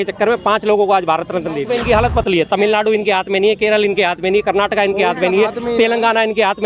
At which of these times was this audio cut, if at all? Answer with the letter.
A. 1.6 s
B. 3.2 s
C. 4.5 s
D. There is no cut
A